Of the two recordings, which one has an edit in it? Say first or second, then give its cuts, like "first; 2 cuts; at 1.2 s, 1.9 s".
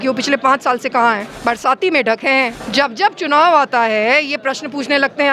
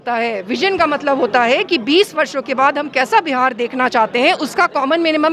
first; 2 cuts; at 1.3 s, 2.6 s